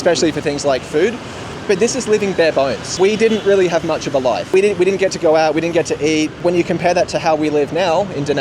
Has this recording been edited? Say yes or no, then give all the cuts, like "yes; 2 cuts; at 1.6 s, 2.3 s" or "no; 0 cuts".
yes; 4 cuts; at 1.5 s, 2.9 s, 4.5 s, 6.4 s